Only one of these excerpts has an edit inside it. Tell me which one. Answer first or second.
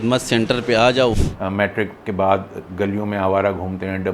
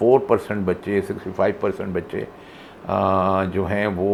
first